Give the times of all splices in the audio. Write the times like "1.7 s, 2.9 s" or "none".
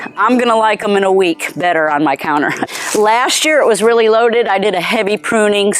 2.6 s